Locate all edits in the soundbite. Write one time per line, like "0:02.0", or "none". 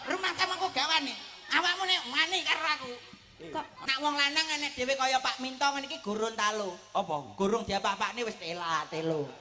0:03.8